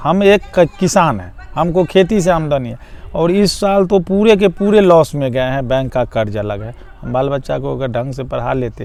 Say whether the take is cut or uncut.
uncut